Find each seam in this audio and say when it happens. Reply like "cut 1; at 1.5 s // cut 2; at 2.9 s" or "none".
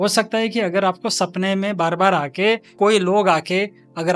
cut 1; at 2.7 s